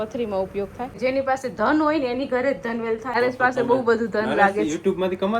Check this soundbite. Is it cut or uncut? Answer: cut